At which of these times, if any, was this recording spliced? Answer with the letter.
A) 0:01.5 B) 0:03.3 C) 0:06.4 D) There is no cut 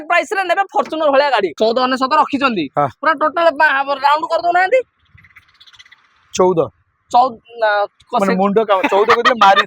A